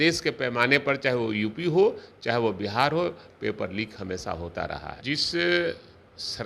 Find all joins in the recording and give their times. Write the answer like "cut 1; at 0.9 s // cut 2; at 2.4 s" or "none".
cut 1; at 4.9 s